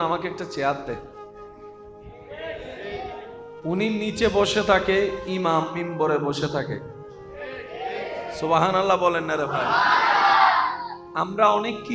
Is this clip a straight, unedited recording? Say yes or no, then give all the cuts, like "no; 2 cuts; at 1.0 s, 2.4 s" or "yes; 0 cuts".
no; 2 cuts; at 1.0 s, 2.3 s